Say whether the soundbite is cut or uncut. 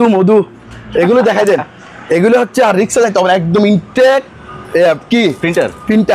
uncut